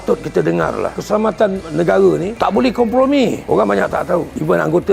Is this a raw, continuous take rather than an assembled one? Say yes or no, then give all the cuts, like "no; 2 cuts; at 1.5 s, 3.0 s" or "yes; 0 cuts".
no; 1 cut; at 3.4 s